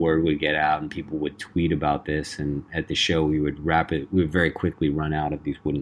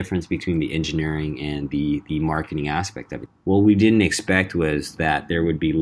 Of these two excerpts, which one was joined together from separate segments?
second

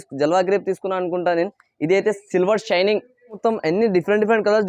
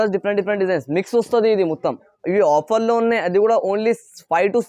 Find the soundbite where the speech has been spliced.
first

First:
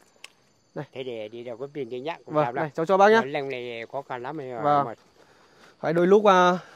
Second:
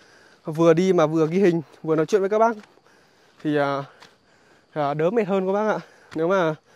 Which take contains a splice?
first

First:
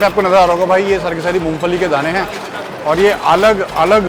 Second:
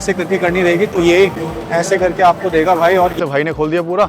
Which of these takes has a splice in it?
second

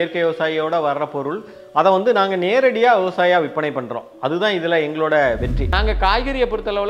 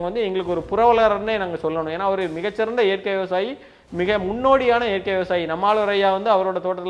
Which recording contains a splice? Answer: first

